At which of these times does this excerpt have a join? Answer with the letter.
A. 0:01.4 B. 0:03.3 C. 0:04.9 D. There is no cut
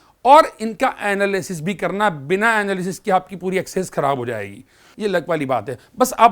C